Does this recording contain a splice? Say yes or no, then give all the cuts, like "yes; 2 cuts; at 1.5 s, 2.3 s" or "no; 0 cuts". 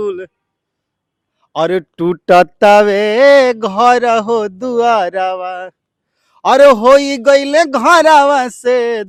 no; 0 cuts